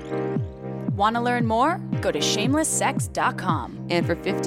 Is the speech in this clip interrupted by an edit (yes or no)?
yes